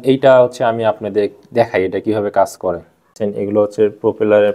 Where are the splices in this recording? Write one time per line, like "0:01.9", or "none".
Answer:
0:03.1